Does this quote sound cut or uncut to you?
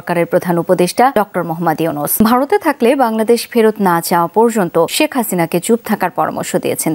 cut